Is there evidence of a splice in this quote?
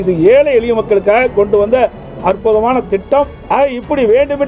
yes; 1 cut; at 3.4 s

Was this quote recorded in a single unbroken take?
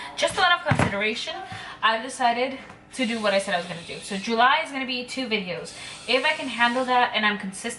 yes; 0 cuts

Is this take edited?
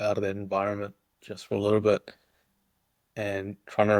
no; 0 cuts

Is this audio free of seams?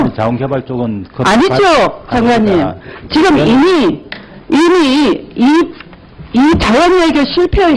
yes; 0 cuts

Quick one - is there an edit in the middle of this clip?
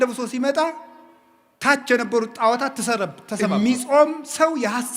yes; 1 cut; at 3.3 s

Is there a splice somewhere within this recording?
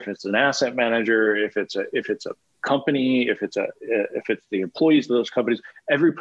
no; 0 cuts

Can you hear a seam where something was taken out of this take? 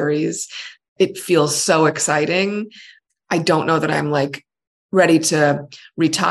yes; 2 cuts; at 0.9 s, 2.9 s

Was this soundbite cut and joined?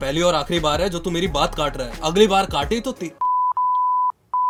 no; 0 cuts

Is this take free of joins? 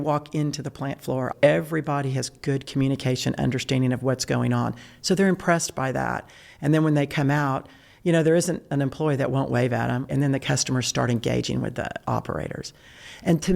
no; 2 cuts; at 1.3 s, 10.1 s

